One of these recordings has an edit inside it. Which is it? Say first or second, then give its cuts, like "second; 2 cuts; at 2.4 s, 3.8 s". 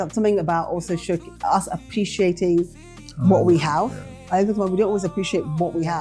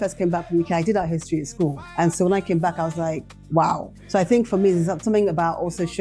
second; 3 cuts; at 1.8 s, 3.3 s, 3.9 s